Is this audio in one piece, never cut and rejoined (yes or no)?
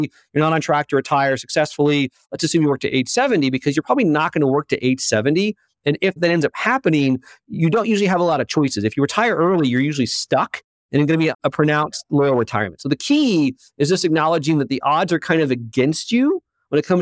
no